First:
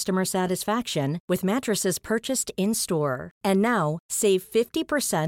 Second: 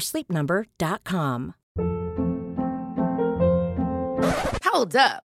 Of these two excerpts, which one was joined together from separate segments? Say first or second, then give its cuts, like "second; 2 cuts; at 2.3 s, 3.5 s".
second; 1 cut; at 1.6 s